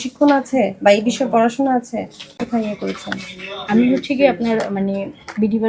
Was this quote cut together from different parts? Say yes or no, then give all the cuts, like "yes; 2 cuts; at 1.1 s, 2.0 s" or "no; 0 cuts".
no; 0 cuts